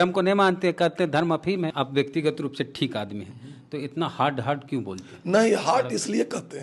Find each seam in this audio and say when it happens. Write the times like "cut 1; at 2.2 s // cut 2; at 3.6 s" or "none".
cut 1; at 1.7 s